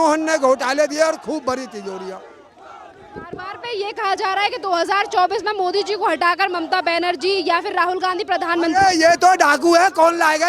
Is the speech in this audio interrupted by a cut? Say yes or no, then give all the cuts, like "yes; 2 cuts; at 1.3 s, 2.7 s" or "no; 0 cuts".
no; 0 cuts